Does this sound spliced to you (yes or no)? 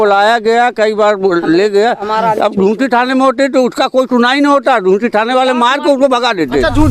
no